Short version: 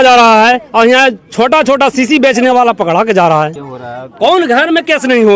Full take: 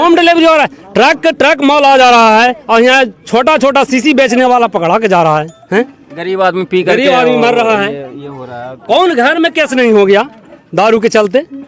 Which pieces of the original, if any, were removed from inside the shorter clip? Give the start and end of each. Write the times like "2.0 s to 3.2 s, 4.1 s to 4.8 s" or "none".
5.6 s to 8.3 s